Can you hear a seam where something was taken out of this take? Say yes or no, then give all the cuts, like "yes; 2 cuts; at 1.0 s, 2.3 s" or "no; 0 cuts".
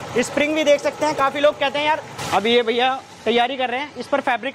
yes; 1 cut; at 2.1 s